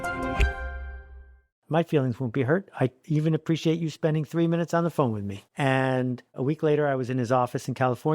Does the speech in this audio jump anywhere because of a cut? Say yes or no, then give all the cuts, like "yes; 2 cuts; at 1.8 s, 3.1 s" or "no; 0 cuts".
yes; 2 cuts; at 1.6 s, 6.4 s